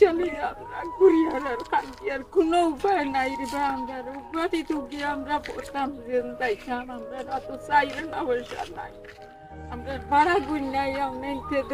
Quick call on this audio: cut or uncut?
uncut